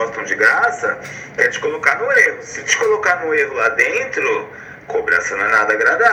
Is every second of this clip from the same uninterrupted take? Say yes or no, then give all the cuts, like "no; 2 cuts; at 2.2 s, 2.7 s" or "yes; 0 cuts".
yes; 0 cuts